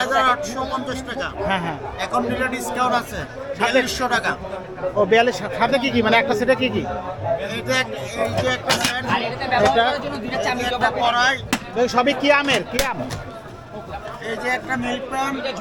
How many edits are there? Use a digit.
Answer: 0